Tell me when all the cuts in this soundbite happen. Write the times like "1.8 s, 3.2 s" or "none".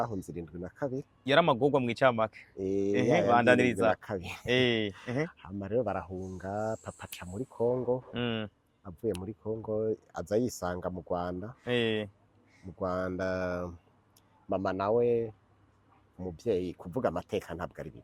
none